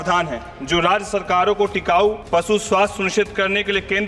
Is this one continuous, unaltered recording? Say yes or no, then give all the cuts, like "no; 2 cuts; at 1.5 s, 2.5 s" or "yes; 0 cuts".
no; 1 cut; at 2.2 s